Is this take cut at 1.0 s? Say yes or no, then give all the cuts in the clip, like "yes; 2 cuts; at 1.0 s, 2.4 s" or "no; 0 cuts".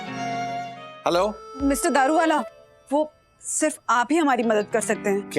yes; 1 cut; at 1.0 s